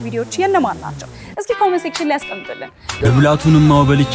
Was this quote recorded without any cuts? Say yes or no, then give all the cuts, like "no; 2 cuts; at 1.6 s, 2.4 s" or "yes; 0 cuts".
no; 1 cut; at 2.9 s